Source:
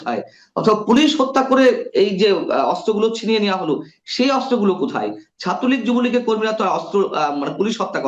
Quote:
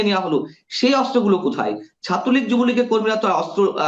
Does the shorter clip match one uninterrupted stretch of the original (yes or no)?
yes